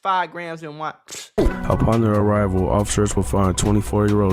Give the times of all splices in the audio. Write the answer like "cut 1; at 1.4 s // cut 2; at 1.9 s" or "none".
cut 1; at 1.4 s